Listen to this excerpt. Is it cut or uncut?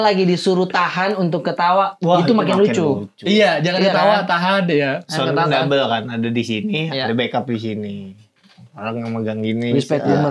uncut